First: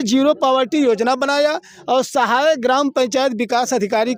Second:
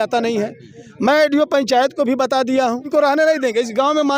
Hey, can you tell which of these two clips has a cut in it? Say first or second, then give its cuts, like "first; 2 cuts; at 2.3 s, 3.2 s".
second; 1 cut; at 2.9 s